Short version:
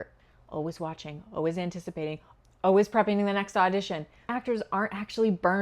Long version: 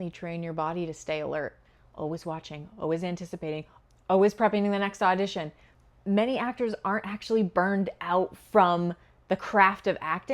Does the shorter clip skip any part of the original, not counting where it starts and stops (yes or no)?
yes